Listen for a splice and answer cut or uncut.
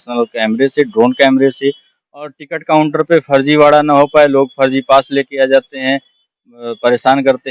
uncut